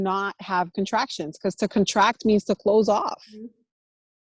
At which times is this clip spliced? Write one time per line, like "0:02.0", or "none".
none